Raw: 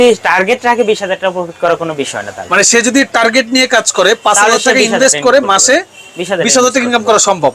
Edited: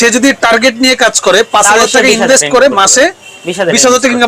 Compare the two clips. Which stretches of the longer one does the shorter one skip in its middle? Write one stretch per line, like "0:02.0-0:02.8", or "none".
none